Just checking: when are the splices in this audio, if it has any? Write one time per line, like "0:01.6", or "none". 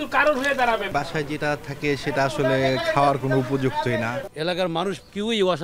0:00.9
0:04.3